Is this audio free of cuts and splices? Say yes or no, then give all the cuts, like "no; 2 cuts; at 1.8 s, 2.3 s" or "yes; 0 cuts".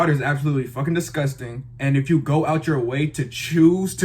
yes; 0 cuts